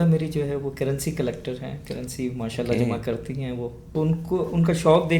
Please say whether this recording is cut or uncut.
cut